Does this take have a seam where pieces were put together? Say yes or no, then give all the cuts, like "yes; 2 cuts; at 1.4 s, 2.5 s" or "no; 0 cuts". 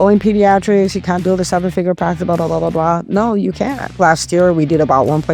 yes; 2 cuts; at 1.2 s, 4.0 s